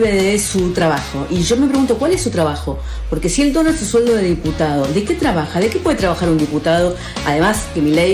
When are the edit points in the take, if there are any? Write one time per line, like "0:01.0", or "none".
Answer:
none